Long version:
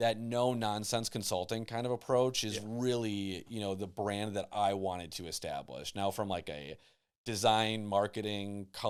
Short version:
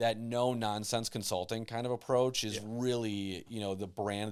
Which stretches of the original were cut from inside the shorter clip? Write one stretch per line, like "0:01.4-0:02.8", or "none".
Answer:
none